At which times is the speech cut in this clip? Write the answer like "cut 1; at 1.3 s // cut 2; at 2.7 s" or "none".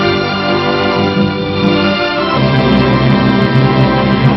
none

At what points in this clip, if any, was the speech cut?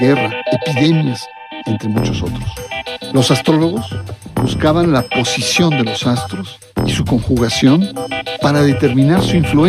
cut 1; at 6.6 s

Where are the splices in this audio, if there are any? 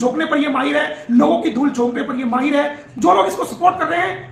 cut 1; at 2.8 s

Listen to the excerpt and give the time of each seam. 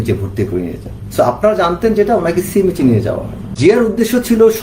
cut 1; at 3.5 s

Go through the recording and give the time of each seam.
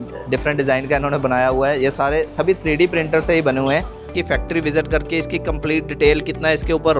cut 1; at 4.1 s

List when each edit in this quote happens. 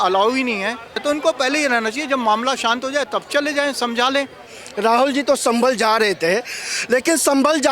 cut 1; at 1.0 s // cut 2; at 4.5 s

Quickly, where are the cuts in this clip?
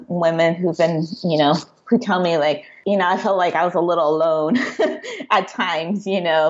cut 1; at 2.7 s

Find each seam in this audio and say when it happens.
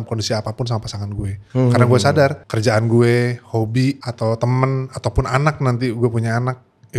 cut 1; at 1.3 s // cut 2; at 2.5 s // cut 3; at 4.1 s

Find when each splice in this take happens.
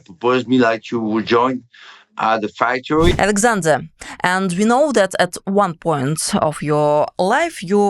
cut 1; at 3.1 s

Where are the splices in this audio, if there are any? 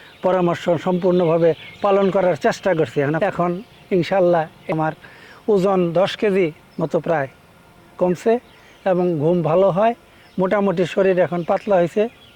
cut 1; at 3.2 s // cut 2; at 4.6 s

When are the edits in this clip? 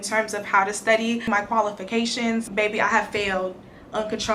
cut 1; at 1.3 s // cut 2; at 2.5 s

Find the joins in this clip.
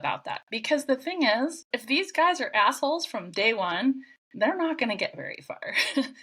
cut 1; at 1.7 s

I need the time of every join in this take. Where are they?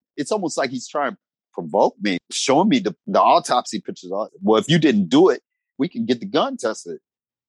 cut 1; at 1.4 s // cut 2; at 2.2 s // cut 3; at 3.0 s // cut 4; at 4.3 s // cut 5; at 5.8 s

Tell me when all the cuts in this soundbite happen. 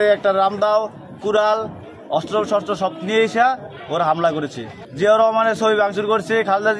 none

